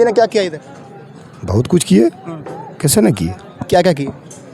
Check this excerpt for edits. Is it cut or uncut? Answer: uncut